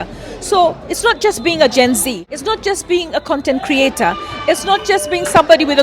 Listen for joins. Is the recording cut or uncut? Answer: cut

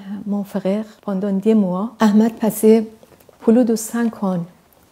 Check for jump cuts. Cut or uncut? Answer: cut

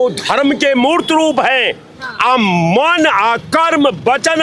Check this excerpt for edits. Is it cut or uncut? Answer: uncut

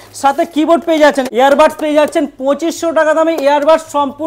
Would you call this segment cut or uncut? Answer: cut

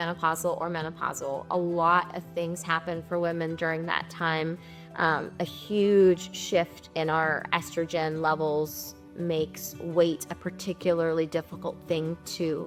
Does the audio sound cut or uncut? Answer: uncut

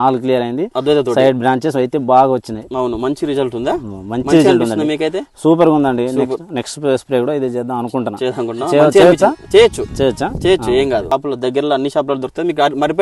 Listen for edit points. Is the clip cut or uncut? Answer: cut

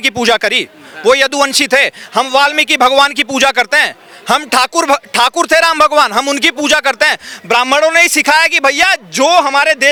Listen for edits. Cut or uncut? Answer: uncut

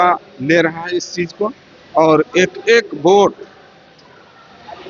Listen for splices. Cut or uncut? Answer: uncut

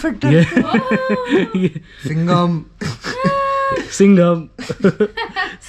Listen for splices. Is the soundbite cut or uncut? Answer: uncut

